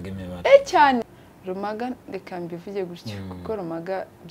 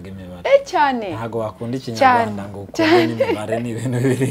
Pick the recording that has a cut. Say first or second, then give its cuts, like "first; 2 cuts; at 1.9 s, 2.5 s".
first; 1 cut; at 1.1 s